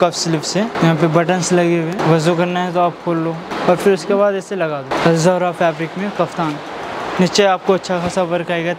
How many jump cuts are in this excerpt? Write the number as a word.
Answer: four